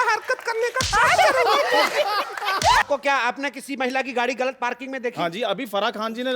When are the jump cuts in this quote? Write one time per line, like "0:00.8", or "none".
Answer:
0:02.8